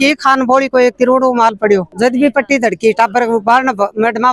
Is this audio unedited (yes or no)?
yes